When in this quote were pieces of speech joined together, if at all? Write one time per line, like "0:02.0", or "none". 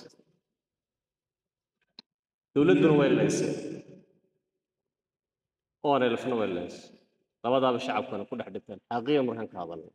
none